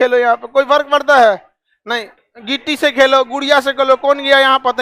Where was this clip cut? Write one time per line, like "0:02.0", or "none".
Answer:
0:02.1